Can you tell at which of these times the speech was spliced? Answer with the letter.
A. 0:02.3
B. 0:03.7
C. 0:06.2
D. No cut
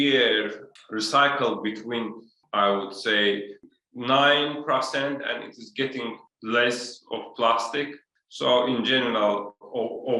C